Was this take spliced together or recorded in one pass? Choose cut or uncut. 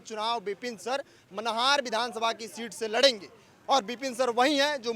uncut